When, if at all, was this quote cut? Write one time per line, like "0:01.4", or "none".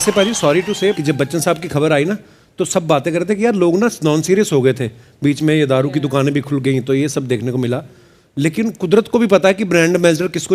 0:00.9

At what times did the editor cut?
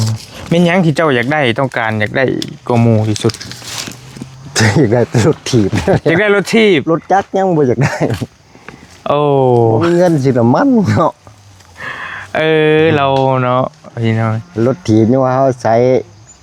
none

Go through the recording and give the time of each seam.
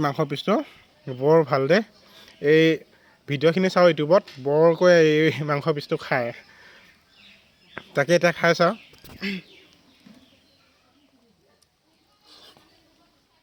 none

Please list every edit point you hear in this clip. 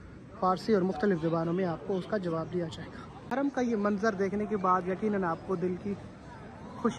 0:03.2

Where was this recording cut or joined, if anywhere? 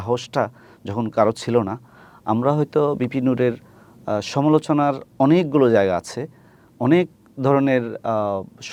none

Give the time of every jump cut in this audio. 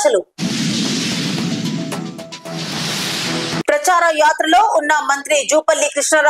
none

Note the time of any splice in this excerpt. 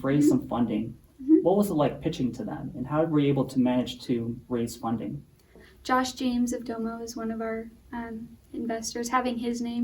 0:05.6

